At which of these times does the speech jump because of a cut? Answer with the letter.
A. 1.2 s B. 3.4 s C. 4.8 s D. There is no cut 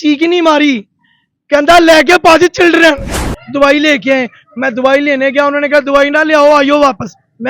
B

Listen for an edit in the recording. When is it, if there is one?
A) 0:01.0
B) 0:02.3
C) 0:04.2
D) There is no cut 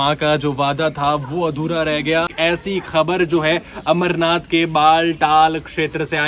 B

